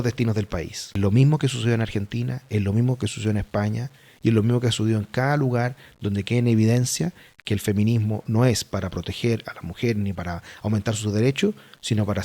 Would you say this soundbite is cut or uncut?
cut